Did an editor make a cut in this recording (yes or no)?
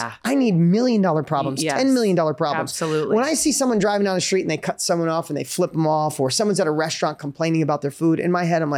no